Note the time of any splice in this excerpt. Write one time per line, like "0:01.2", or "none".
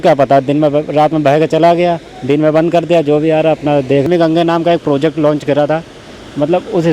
0:04.1